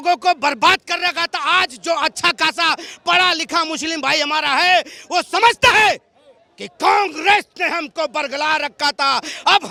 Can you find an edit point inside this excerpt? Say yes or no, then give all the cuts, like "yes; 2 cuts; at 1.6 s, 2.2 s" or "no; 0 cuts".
no; 0 cuts